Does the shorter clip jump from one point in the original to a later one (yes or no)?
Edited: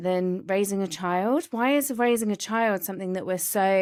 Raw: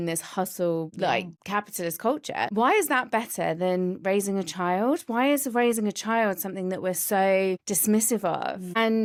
no